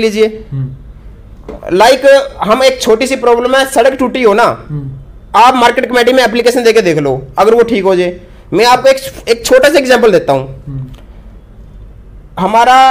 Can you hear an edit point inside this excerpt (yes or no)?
no